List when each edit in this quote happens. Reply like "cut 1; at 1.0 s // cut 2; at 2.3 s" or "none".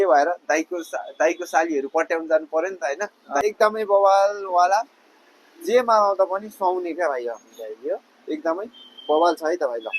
cut 1; at 3.3 s